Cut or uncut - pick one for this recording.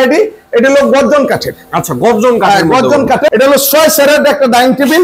cut